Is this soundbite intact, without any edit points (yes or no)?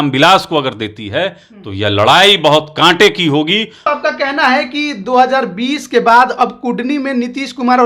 no